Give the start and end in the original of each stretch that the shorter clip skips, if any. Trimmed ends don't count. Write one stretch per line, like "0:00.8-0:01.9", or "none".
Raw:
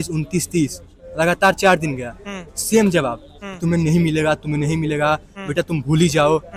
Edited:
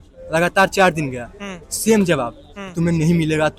none